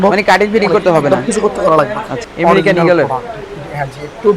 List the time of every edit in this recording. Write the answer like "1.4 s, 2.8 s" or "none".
2.2 s